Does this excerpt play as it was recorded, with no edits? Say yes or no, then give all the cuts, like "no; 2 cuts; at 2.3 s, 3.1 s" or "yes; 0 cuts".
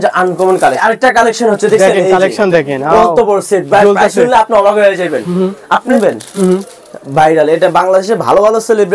no; 2 cuts; at 0.8 s, 5.9 s